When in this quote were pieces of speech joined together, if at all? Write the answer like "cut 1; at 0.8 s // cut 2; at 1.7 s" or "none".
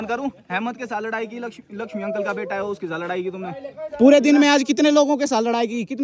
none